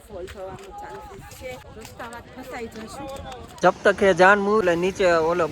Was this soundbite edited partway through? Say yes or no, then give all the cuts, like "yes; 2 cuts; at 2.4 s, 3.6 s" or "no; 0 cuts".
yes; 3 cuts; at 1.6 s, 3.6 s, 4.6 s